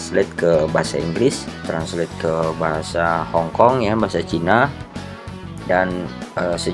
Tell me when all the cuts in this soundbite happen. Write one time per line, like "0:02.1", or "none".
0:01.5